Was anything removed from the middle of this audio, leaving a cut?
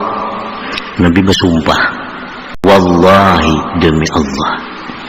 yes; 1 cut; at 2.6 s

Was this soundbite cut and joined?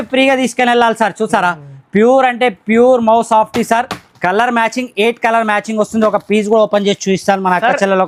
no; 0 cuts

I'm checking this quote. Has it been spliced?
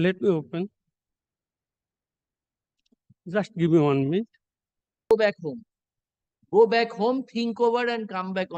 yes; 1 cut; at 5.1 s

